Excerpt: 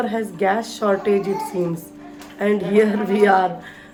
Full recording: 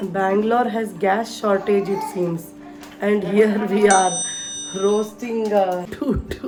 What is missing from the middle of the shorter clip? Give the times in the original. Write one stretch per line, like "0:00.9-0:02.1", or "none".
none